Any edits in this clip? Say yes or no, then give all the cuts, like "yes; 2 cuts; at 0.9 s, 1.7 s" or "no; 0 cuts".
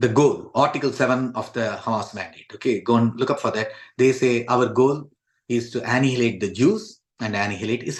no; 0 cuts